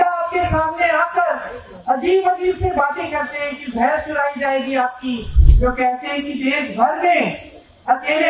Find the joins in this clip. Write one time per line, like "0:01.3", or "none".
0:05.3